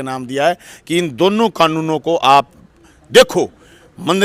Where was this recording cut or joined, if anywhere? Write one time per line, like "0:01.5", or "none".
none